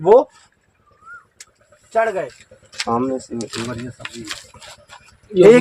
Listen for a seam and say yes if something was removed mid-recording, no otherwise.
yes